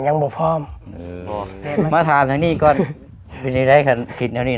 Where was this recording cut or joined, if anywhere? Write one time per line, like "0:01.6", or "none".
0:01.5